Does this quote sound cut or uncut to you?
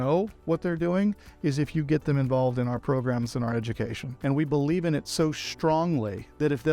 cut